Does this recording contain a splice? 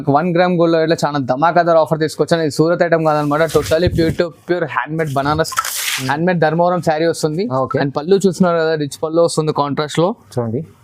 no; 0 cuts

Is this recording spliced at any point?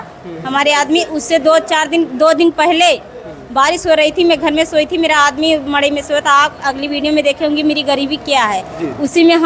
no; 0 cuts

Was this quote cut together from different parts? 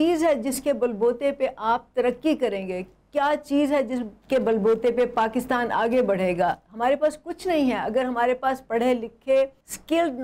no; 0 cuts

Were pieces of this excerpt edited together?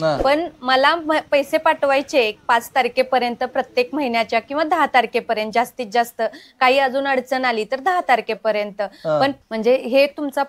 yes; 1 cut; at 9.3 s

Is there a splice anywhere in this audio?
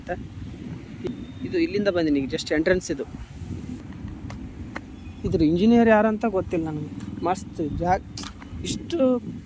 yes; 2 cuts; at 1.1 s, 3.8 s

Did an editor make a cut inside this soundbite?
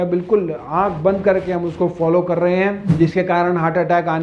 yes; 1 cut; at 2.8 s

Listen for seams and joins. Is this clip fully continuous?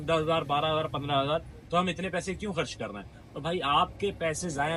yes; 0 cuts

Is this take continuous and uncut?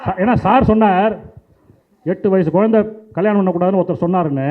yes; 0 cuts

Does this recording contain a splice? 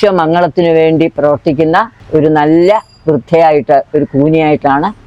no; 0 cuts

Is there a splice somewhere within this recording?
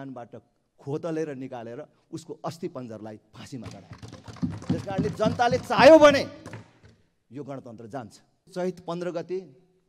yes; 1 cut; at 8.5 s

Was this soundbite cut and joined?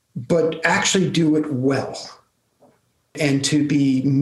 yes; 1 cut; at 3.2 s

